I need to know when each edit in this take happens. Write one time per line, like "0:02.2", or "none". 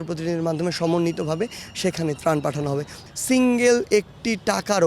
0:02.9